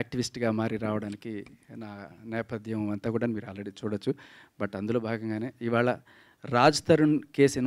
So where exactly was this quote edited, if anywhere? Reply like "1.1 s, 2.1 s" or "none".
none